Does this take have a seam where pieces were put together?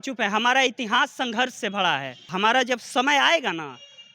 yes; 1 cut; at 2.2 s

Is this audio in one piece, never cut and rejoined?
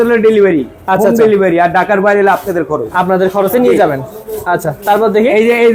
yes; 0 cuts

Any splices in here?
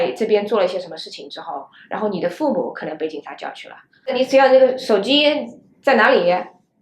yes; 1 cut; at 3.9 s

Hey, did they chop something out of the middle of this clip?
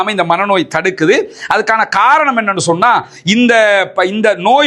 no; 0 cuts

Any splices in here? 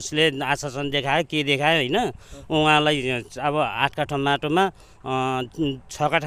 no; 0 cuts

